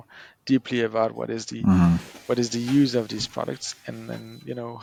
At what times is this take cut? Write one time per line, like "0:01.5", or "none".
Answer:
none